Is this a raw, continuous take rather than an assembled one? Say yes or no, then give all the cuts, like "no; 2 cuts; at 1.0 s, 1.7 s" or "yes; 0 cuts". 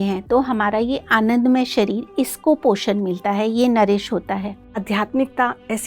no; 1 cut; at 4.8 s